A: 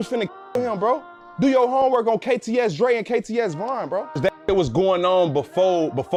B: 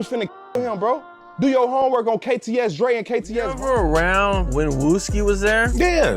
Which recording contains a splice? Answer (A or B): B